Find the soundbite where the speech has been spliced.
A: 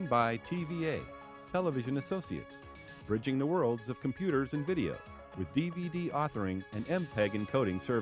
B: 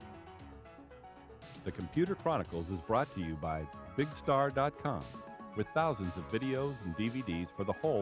B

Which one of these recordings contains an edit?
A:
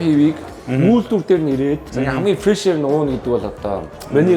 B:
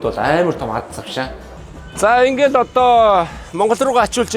B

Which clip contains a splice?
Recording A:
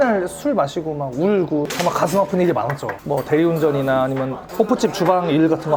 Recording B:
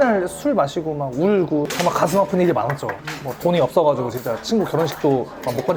A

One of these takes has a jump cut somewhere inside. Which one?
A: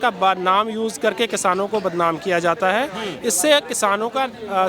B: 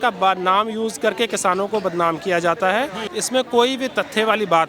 B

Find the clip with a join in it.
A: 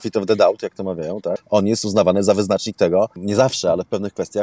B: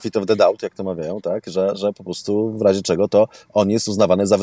A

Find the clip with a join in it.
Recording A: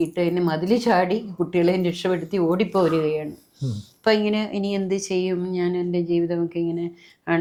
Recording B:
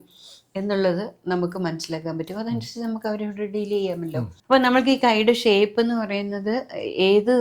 B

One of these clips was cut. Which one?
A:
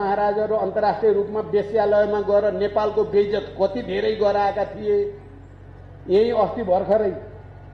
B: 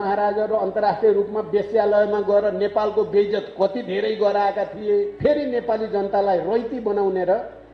B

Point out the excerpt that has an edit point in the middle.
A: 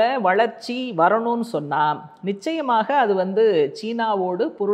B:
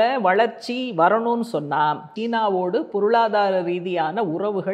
B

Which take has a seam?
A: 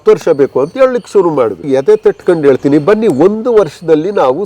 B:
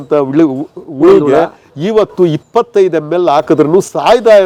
A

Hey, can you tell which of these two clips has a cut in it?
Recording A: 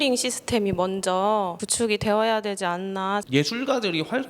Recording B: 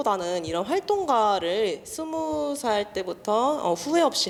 A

